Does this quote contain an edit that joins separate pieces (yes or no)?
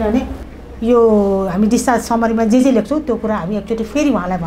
no